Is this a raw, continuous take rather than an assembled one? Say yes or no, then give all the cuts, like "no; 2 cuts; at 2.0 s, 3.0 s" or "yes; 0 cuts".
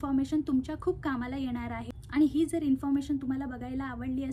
yes; 0 cuts